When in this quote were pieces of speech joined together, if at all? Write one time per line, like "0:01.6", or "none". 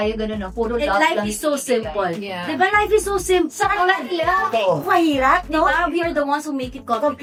none